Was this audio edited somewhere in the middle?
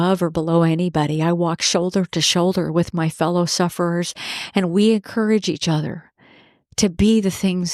no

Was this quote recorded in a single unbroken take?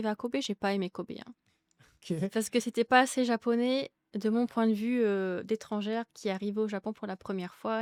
yes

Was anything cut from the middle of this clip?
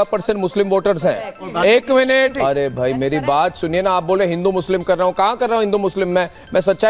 yes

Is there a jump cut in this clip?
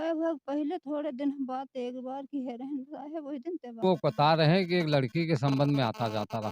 yes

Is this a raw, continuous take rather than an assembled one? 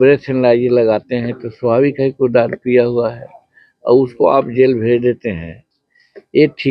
yes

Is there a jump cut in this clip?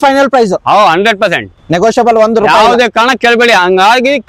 no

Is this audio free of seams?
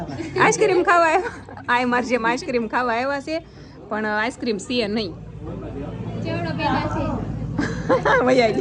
yes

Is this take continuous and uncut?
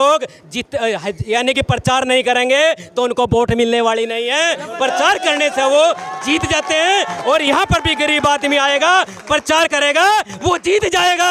yes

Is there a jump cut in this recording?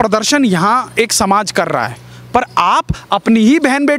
no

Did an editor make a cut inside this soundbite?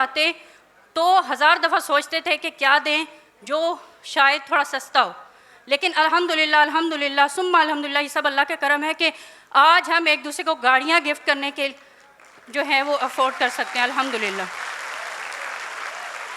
no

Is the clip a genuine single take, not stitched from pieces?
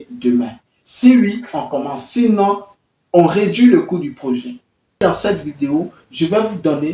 no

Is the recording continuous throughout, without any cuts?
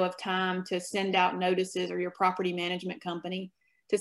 yes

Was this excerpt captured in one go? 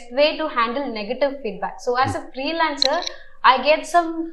yes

